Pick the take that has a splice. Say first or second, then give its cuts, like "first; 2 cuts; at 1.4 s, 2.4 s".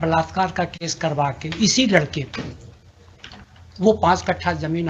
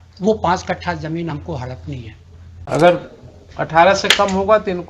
second; 1 cut; at 2.5 s